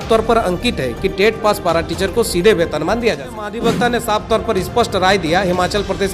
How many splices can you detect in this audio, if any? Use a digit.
1